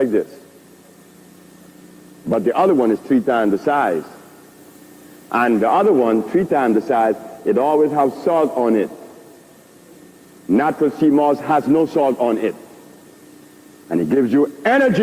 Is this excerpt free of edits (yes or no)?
no